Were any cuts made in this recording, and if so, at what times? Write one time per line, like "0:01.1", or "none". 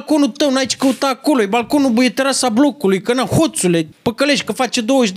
0:03.9